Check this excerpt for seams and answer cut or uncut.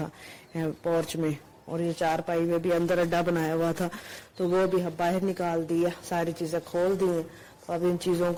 uncut